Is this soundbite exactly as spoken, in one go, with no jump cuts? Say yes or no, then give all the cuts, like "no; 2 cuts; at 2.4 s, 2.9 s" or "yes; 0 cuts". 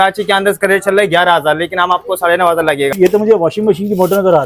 no; 1 cut; at 2.9 s